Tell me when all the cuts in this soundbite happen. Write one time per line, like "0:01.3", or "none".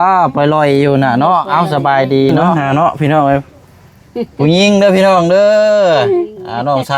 0:02.4